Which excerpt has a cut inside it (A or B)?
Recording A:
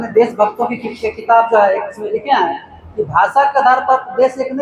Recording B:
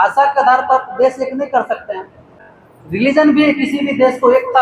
B